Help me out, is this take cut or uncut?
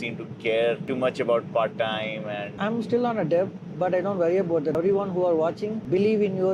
cut